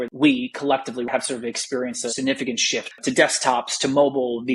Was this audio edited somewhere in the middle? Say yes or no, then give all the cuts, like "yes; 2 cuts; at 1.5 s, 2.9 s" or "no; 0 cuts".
yes; 3 cuts; at 1.1 s, 2.1 s, 3.0 s